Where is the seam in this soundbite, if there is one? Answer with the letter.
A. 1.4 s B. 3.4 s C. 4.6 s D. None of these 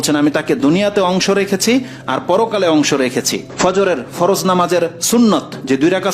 B